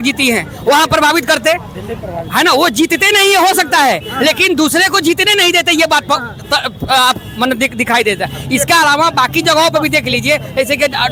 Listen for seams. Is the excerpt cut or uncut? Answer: uncut